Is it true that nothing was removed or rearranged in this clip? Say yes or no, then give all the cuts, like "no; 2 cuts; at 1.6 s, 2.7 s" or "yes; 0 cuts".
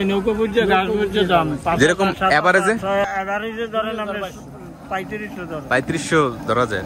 no; 1 cut; at 3.0 s